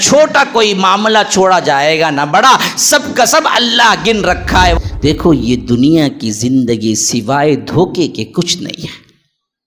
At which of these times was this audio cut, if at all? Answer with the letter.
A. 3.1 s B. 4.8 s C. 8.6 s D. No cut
B